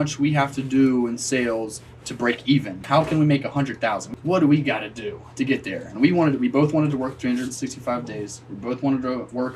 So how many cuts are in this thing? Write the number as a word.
two